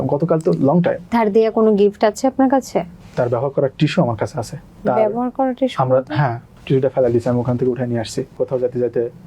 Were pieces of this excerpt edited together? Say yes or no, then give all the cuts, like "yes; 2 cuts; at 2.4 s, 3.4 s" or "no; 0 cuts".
yes; 3 cuts; at 3.0 s, 6.5 s, 8.4 s